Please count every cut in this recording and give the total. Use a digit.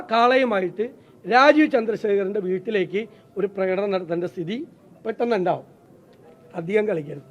1